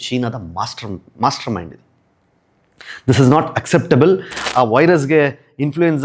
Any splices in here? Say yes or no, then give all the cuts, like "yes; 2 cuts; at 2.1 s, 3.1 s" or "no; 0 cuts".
yes; 1 cut; at 4.4 s